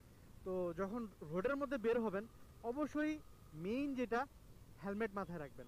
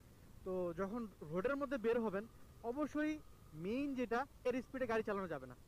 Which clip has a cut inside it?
second; 1 cut; at 4.2 s

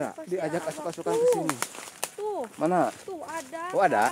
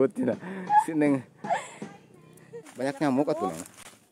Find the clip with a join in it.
second; 1 cut; at 2.6 s

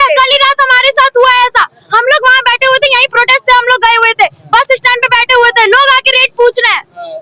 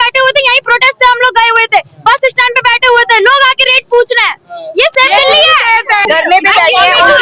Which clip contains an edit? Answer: second; 1 cut; at 6.1 s

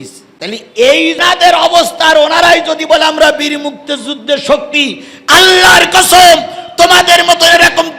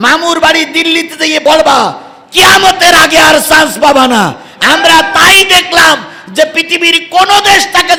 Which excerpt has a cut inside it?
first; 1 cut; at 1.2 s

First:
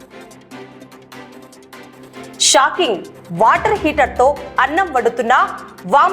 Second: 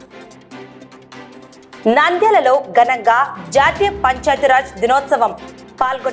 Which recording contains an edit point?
first; 1 cut; at 1.8 s

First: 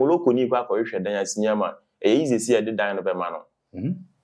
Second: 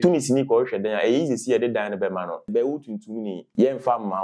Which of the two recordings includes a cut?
second; 2 cuts; at 2.5 s, 3.4 s

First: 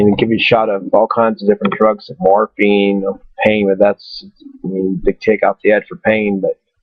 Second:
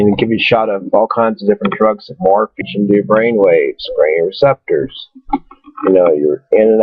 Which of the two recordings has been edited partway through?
first; 1 cut; at 2.6 s

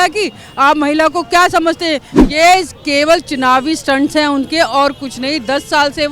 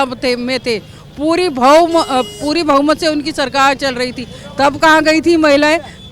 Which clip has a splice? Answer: first; 1 cut; at 2.1 s

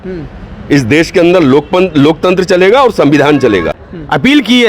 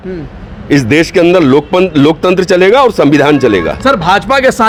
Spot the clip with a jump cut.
first; 1 cut; at 3.7 s

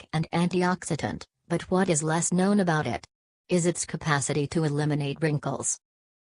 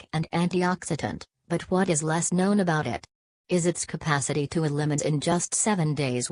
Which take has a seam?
first; 1 cut; at 5.0 s

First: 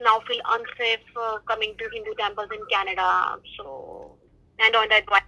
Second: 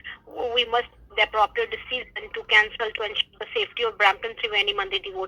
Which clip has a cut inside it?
first; 1 cut; at 4.1 s

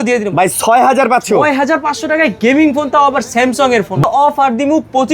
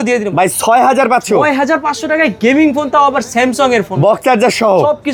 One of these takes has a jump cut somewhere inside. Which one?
first; 1 cut; at 4.0 s

